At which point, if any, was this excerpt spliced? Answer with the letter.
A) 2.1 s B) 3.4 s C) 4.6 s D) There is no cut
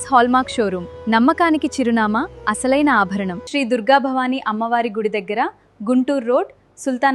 B